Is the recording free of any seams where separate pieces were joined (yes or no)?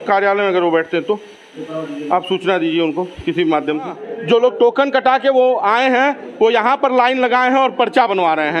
no